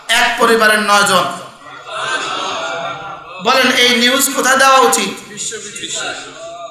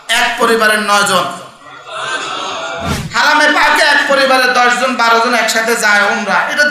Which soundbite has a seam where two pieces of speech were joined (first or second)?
second